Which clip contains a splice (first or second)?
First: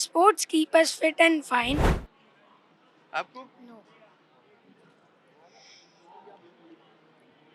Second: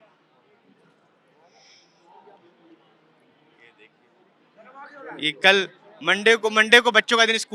first